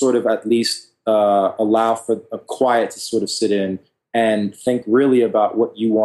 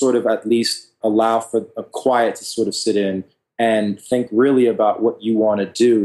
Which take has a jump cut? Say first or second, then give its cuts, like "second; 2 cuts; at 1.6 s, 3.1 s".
second; 1 cut; at 1.0 s